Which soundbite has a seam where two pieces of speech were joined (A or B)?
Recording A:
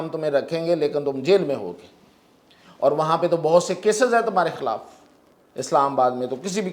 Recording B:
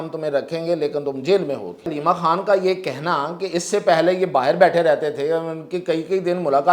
B